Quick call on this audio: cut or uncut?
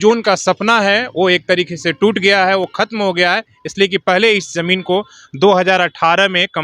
uncut